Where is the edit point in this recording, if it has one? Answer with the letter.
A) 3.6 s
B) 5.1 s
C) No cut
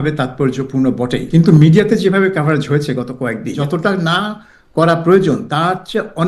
A